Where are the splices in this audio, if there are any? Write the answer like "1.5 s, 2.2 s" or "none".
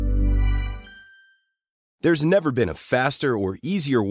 1.8 s